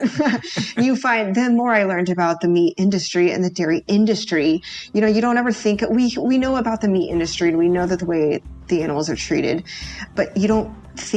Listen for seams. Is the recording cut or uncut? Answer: cut